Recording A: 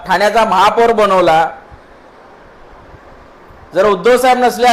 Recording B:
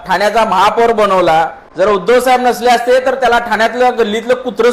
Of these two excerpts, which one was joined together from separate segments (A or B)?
B